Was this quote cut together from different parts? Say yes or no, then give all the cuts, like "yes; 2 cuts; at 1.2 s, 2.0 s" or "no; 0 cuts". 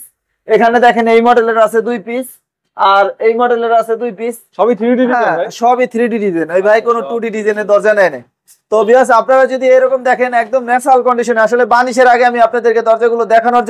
no; 0 cuts